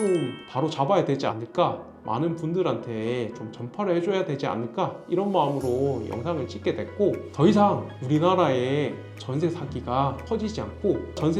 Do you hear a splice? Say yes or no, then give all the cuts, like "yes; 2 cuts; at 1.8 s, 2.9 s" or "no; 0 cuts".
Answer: yes; 1 cut; at 1.9 s